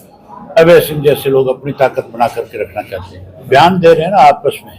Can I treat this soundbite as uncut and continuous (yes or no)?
no